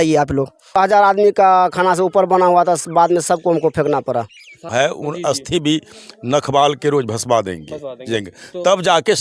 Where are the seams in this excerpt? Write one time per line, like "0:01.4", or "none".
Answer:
0:00.8
0:04.5